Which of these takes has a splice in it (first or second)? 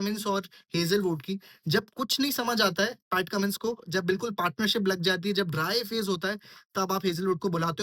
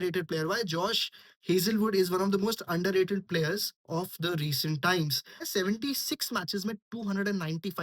second